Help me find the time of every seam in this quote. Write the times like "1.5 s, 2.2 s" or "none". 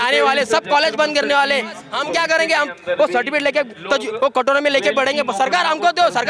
1.9 s